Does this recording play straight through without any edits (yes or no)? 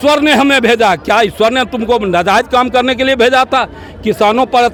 yes